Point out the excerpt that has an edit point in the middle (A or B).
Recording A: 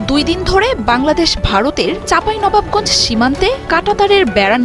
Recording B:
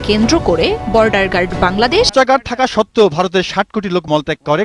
B